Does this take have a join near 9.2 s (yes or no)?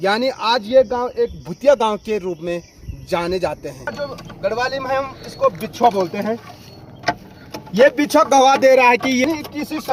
yes